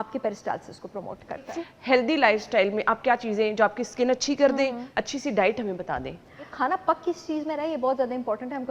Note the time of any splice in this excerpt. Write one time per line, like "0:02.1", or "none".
0:01.4
0:04.9
0:06.5